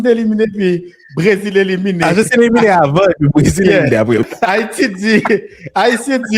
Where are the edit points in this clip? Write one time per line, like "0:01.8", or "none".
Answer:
0:04.2